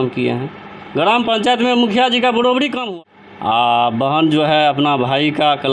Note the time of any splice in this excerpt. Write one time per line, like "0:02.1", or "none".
0:02.8

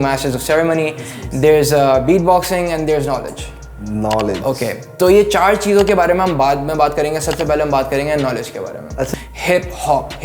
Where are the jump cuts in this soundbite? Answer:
0:09.1

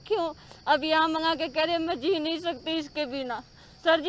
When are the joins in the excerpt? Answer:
none

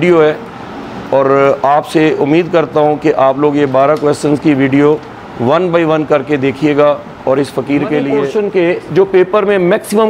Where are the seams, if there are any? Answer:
0:08.1

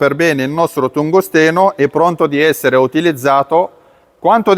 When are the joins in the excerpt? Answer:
none

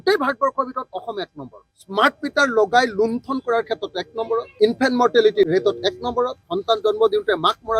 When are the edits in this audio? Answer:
0:01.7
0:04.5
0:06.5

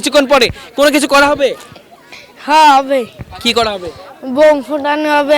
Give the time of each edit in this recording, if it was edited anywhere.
none

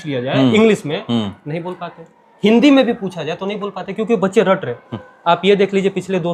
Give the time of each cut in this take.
none

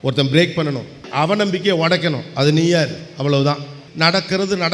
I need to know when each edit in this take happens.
0:01.0
0:03.8

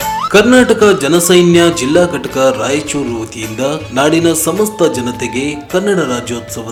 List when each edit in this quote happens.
none

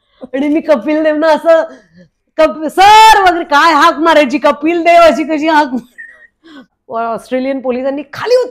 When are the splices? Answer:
0:06.7

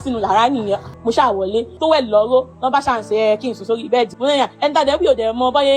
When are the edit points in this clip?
0:00.9
0:01.8
0:04.1

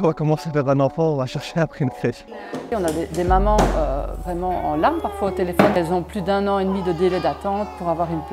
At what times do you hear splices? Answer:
0:02.6
0:05.8

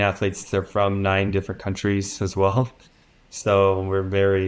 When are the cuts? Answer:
none

